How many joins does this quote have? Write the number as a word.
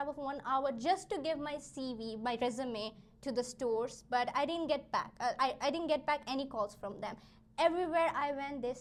zero